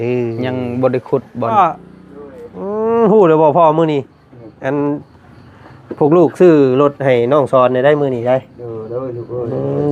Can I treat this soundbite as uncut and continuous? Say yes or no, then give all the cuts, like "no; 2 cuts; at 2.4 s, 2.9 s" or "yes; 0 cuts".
no; 1 cut; at 1.5 s